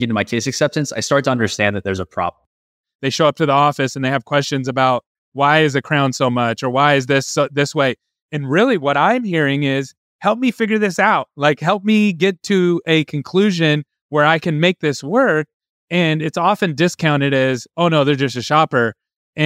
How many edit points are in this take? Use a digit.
1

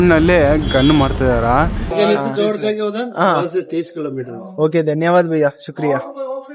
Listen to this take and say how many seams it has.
1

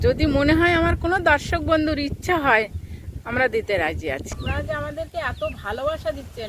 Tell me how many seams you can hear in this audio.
1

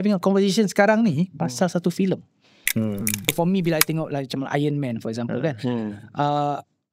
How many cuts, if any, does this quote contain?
1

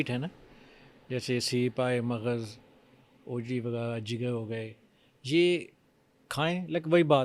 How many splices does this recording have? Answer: 0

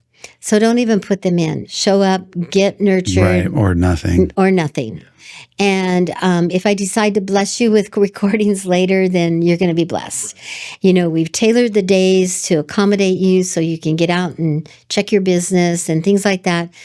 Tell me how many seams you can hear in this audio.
2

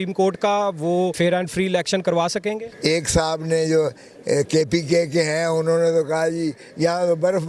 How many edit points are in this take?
2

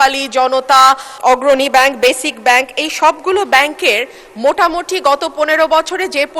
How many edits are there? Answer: 1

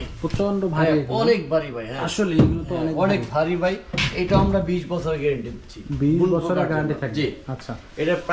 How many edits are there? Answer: 0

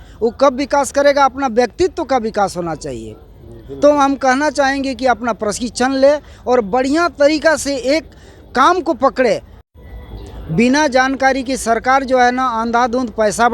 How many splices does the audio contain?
1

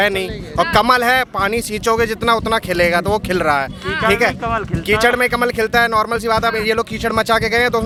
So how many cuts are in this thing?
0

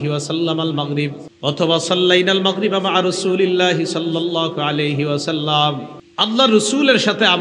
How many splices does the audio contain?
2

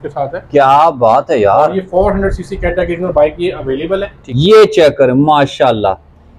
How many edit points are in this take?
1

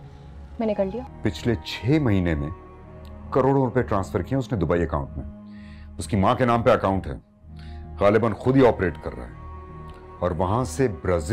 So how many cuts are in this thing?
1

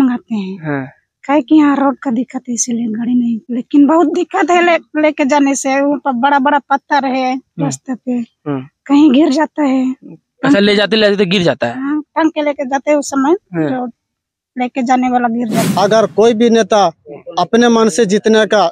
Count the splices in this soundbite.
2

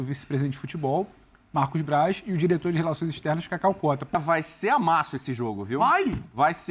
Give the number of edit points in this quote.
1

